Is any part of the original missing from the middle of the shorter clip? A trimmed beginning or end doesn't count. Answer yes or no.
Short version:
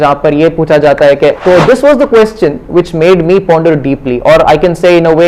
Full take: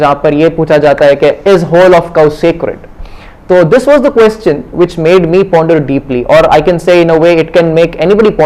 yes